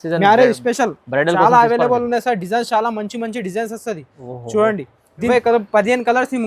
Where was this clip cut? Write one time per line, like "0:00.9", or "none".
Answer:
0:05.3